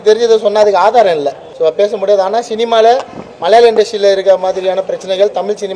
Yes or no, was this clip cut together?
yes